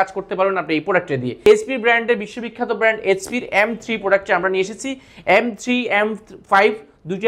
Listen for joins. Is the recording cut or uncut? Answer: cut